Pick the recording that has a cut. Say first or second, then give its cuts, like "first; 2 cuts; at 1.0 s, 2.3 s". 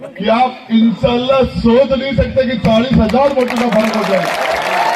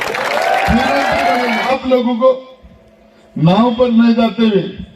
second; 1 cut; at 1.7 s